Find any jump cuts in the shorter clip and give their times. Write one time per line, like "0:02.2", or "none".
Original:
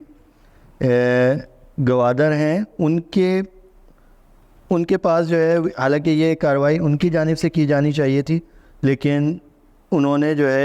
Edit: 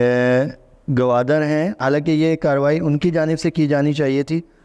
0:01.8